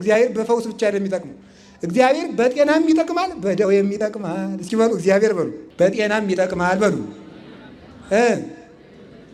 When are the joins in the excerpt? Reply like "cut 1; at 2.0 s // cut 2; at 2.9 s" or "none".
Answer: cut 1; at 5.6 s